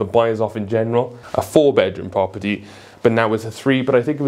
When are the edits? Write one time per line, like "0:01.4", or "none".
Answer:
0:01.2